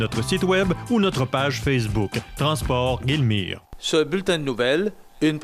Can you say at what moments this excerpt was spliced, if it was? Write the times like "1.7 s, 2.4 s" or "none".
3.7 s